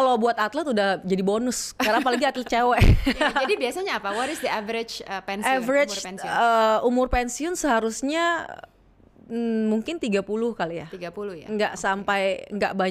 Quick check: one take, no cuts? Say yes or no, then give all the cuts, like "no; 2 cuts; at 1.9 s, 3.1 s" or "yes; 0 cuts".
yes; 0 cuts